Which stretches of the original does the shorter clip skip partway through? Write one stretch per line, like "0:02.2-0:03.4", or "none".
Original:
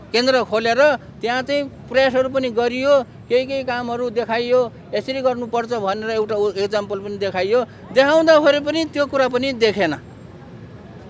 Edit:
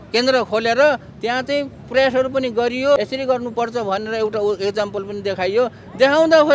0:03.0-0:04.9